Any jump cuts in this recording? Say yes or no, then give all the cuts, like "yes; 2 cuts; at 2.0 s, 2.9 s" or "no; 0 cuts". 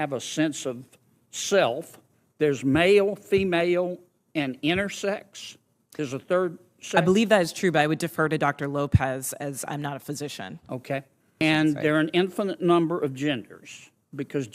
yes; 1 cut; at 11.4 s